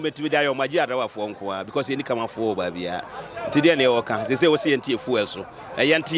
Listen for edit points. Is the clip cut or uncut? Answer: uncut